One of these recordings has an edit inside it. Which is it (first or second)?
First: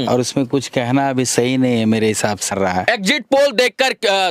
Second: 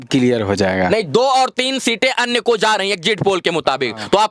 first